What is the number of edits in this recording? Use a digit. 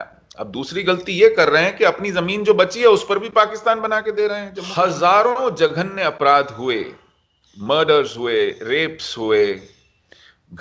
1